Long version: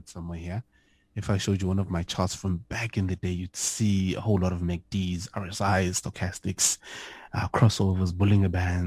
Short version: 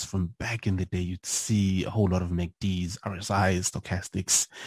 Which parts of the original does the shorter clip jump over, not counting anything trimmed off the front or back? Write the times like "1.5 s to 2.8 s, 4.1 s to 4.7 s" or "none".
none